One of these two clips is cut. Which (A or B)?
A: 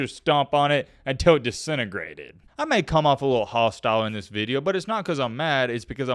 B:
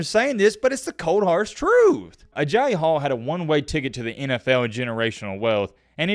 B